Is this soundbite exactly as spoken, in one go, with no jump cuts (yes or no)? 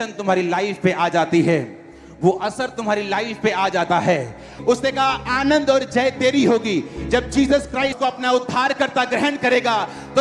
no